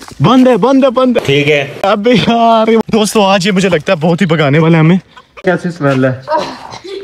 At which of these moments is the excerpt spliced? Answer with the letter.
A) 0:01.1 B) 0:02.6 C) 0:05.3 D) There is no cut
C